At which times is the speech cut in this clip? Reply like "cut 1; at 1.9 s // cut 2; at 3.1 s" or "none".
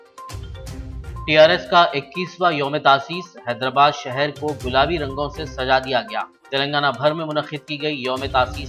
none